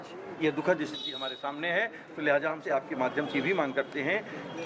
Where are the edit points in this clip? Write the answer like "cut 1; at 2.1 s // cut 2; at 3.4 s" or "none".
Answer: cut 1; at 2.6 s